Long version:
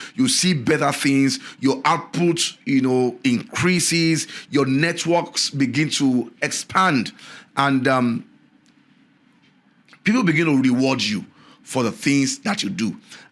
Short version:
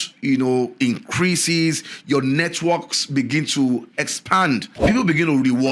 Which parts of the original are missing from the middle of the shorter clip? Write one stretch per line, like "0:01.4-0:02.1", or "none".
0:07.2-0:09.9

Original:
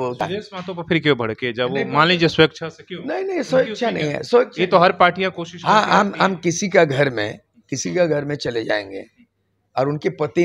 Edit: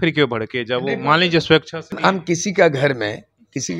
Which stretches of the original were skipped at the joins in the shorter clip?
0:02.8-0:06.1

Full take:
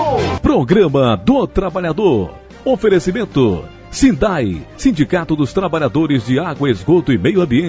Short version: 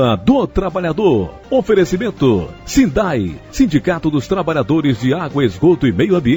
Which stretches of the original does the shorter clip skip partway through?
0:02.4-0:02.5
0:03.7-0:03.8

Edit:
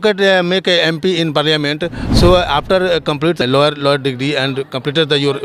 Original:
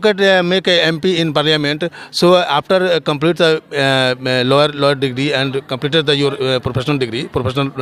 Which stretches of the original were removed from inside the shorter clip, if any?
0:03.4-0:04.4

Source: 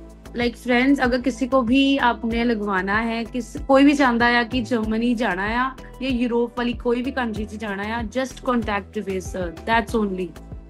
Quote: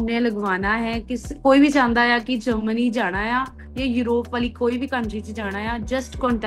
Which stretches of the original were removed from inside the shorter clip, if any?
none

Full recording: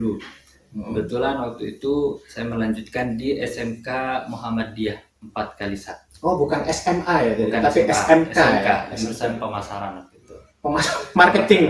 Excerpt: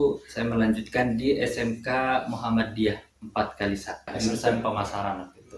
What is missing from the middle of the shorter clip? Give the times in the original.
0:06.1-0:08.9

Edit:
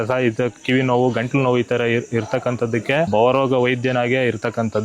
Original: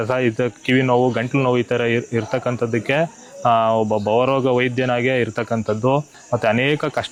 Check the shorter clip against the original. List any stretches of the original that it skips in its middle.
0:03.1-0:04.0

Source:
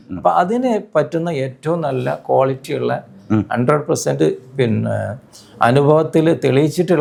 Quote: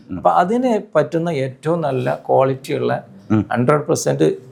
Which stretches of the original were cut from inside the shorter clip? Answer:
none

